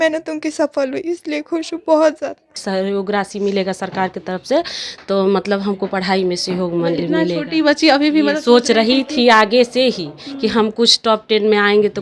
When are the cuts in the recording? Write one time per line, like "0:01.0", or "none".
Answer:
0:02.5